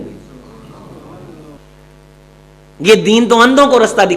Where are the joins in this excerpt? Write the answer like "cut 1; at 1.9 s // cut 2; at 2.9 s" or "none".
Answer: cut 1; at 1.6 s